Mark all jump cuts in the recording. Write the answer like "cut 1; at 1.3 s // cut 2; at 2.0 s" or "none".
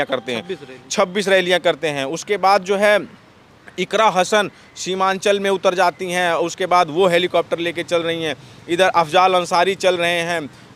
none